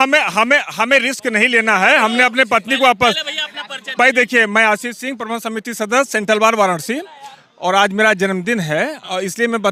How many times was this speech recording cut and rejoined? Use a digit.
0